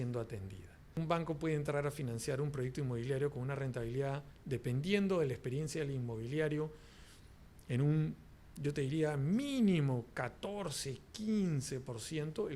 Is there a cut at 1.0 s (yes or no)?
yes